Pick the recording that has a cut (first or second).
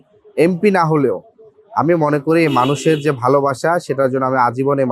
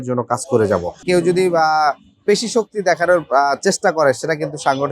second